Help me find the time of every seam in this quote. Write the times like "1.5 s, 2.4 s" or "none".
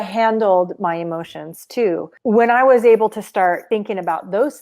2.1 s, 3.6 s

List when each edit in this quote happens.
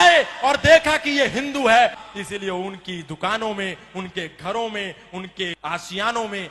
2.0 s, 5.6 s

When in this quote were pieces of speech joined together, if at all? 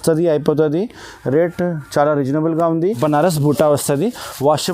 3.0 s

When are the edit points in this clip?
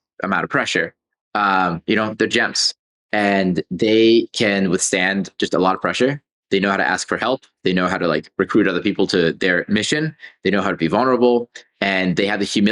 none

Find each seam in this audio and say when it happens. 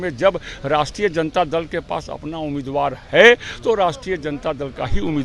none

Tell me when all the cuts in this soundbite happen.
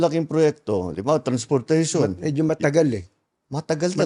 none

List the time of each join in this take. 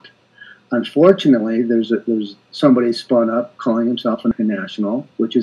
4.3 s

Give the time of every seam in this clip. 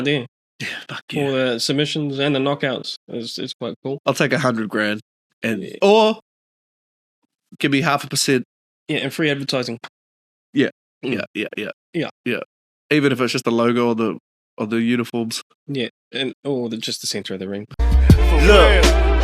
8.7 s, 17.8 s

